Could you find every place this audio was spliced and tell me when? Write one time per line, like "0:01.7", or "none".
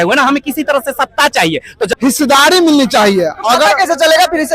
0:01.9